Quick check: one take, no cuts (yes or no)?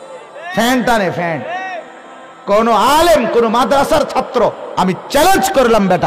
yes